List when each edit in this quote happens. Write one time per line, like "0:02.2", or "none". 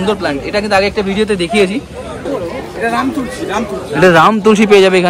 0:02.3